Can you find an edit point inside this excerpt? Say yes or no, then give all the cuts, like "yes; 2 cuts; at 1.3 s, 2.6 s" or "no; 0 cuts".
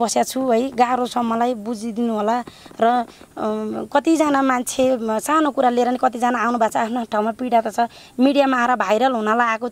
no; 0 cuts